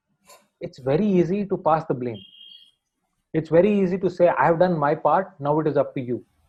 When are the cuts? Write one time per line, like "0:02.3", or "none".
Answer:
none

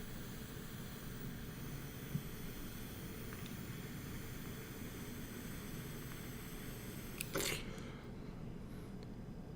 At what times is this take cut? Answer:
0:08.6

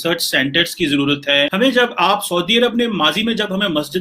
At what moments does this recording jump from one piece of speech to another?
0:01.5

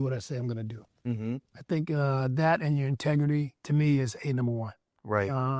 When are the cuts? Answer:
none

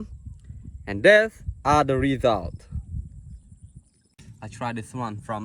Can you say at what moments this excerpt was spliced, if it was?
0:04.0

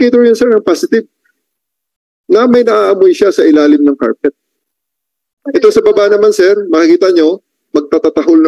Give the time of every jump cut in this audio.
none

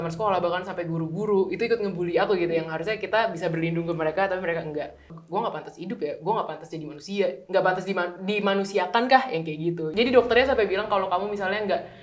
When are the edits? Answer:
0:05.2
0:09.9

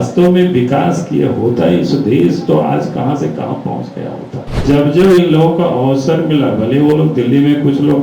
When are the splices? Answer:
0:04.5

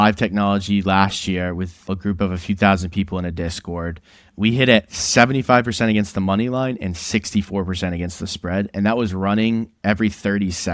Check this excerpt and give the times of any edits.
0:01.8
0:04.2

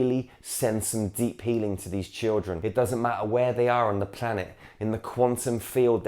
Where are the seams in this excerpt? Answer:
0:02.5

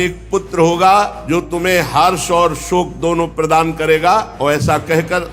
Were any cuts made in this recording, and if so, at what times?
0:01.2
0:04.3

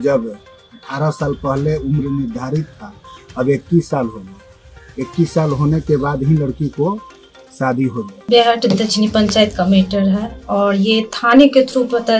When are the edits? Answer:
0:08.3

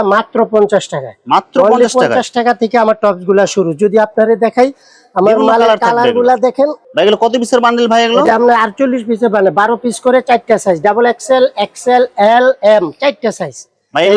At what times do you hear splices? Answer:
none

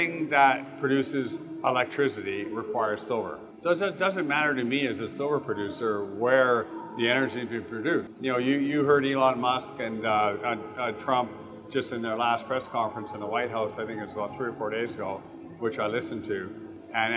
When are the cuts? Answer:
0:03.4
0:08.1

